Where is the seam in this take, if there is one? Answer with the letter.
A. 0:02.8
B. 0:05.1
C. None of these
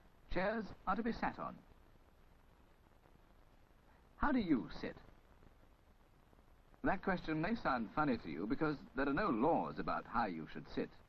A